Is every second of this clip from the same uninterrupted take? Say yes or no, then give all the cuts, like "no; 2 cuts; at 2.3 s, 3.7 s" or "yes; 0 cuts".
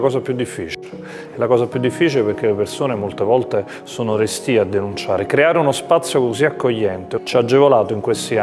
no; 1 cut; at 7.1 s